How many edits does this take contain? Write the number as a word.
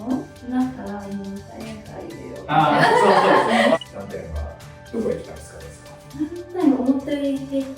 one